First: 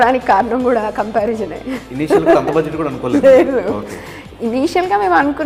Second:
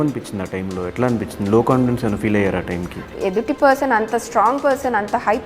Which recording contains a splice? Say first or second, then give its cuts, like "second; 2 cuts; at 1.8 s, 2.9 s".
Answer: second; 1 cut; at 3.1 s